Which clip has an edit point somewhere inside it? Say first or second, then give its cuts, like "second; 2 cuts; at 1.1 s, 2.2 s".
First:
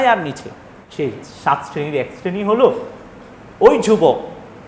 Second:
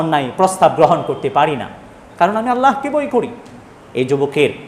first; 1 cut; at 1.3 s